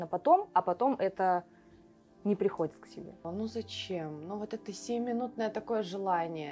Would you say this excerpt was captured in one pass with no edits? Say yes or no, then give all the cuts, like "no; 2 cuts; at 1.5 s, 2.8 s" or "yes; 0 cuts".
no; 1 cut; at 3.2 s